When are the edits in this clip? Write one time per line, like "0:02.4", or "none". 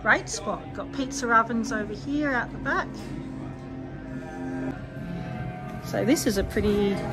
none